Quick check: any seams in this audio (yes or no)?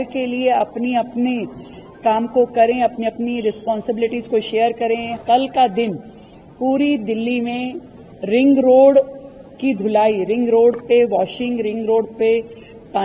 yes